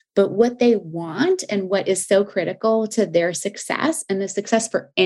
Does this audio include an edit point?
no; 0 cuts

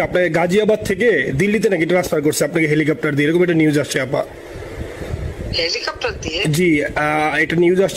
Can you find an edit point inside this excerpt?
no; 0 cuts

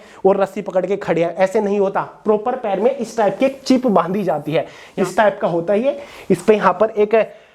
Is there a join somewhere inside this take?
yes; 1 cut; at 4.8 s

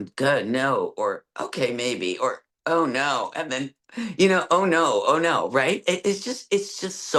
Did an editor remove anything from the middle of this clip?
no; 0 cuts

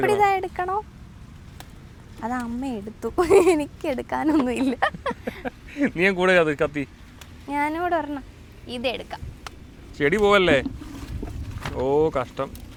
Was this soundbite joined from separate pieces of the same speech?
no; 0 cuts

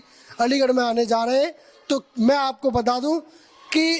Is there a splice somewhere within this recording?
no; 0 cuts

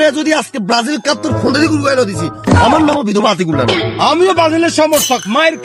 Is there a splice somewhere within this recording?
no; 0 cuts

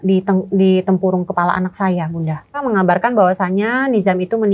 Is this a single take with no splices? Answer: no; 1 cut; at 2.6 s

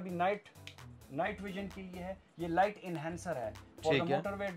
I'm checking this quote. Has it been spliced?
no; 0 cuts

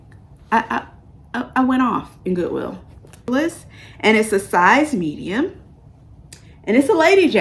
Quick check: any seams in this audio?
yes; 1 cut; at 3.3 s

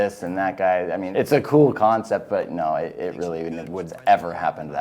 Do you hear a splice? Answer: yes; 2 cuts; at 1.1 s, 3.9 s

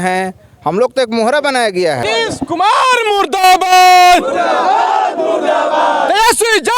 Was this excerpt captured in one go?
yes; 0 cuts

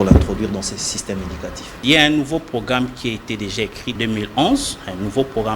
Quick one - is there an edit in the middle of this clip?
yes; 2 cuts; at 1.7 s, 3.8 s

